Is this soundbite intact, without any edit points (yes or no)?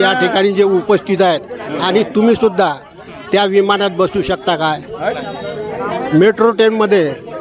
yes